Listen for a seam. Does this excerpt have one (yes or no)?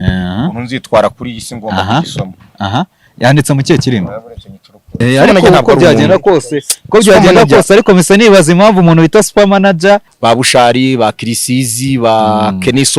yes